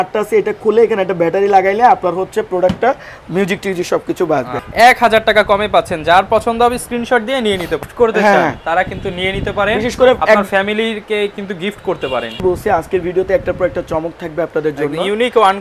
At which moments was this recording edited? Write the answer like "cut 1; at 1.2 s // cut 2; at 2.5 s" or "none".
cut 1; at 4.6 s // cut 2; at 7.9 s // cut 3; at 12.4 s